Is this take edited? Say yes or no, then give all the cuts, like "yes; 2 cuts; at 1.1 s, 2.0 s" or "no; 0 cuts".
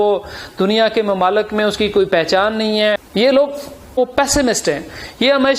yes; 2 cuts; at 3.0 s, 4.0 s